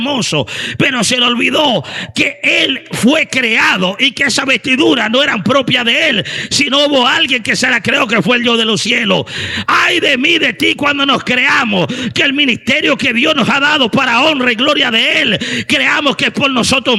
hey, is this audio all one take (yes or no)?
yes